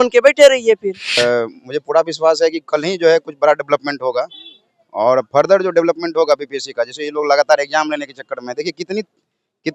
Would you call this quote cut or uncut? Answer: cut